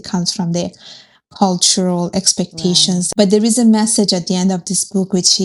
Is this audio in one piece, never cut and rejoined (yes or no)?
no